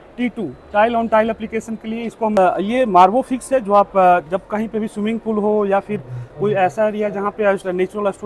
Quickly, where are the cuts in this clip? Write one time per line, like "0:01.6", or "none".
0:02.4